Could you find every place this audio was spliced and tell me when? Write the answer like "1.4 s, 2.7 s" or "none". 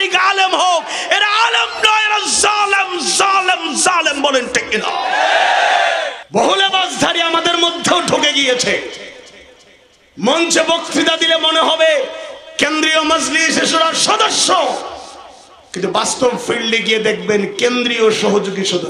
6.2 s